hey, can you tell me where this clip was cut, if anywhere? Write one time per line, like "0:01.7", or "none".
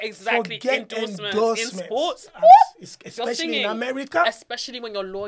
none